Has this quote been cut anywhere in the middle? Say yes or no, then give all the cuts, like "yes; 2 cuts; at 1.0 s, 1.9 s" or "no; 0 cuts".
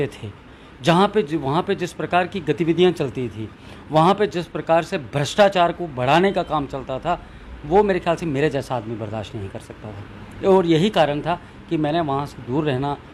no; 0 cuts